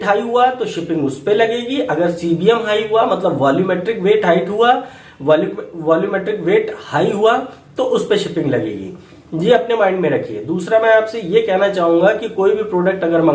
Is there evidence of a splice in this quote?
no; 0 cuts

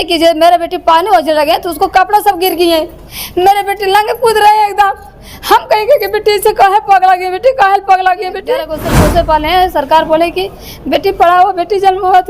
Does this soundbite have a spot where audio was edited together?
yes; 1 cut; at 8.8 s

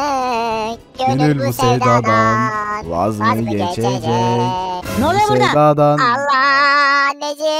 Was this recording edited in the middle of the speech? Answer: no; 0 cuts

